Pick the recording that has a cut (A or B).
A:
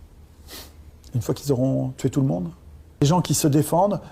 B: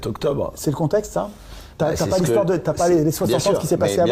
A